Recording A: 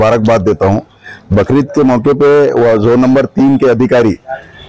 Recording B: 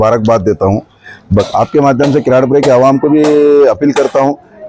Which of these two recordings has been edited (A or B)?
B